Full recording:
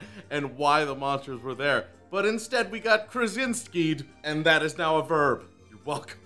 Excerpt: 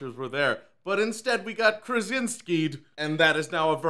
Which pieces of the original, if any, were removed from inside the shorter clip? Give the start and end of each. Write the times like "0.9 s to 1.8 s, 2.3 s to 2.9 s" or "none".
none